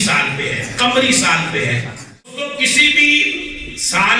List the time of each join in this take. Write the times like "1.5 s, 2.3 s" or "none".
2.6 s